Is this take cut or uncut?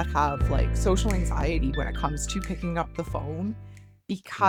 uncut